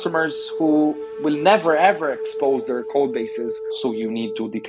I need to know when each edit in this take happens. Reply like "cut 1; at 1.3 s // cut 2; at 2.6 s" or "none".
cut 1; at 3.7 s